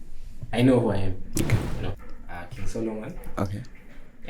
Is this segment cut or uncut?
cut